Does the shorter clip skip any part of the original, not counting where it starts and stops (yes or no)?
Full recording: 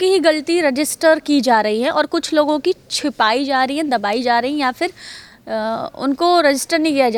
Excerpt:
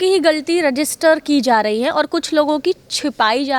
no